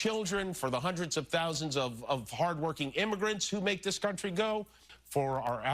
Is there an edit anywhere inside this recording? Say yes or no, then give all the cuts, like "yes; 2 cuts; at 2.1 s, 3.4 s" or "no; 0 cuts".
yes; 1 cut; at 4.8 s